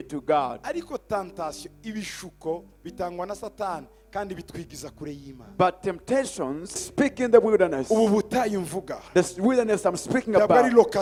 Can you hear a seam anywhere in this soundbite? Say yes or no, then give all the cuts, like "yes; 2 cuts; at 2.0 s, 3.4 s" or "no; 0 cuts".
no; 0 cuts